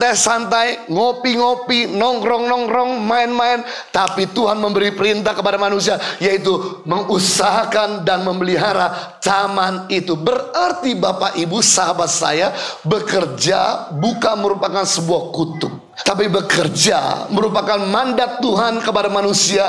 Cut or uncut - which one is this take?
cut